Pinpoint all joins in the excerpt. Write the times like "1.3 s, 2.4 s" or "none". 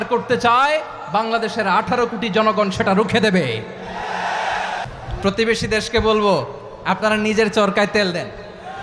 4.9 s